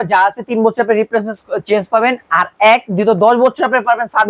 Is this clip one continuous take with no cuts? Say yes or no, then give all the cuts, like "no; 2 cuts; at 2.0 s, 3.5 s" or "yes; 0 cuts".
yes; 0 cuts